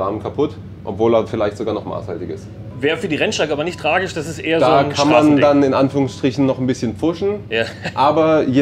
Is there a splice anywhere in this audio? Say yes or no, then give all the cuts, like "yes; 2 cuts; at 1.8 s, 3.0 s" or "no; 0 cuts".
yes; 1 cut; at 2.7 s